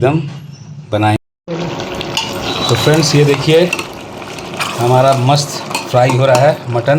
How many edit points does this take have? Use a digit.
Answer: 1